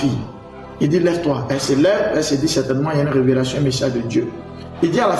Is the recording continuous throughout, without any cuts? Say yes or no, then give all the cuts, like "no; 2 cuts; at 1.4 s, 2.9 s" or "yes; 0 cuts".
yes; 0 cuts